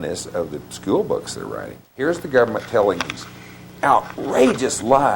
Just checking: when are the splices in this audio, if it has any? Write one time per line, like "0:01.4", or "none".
0:01.8